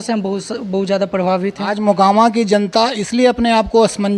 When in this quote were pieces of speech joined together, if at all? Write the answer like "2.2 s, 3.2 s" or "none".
1.7 s

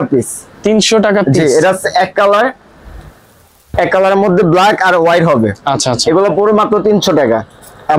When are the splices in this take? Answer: none

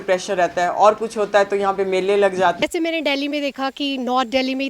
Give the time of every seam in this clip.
2.6 s

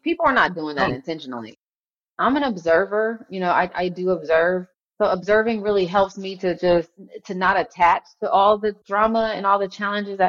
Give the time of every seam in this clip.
1.8 s, 8.8 s

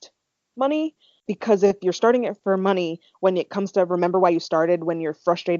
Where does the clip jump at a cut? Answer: 1.1 s

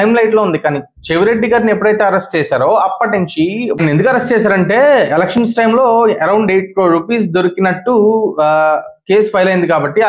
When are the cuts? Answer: none

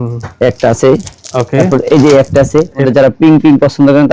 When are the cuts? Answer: 2.8 s

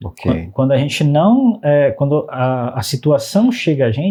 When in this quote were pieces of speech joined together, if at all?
none

